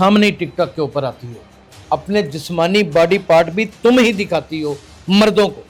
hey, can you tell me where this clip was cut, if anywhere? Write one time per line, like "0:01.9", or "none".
none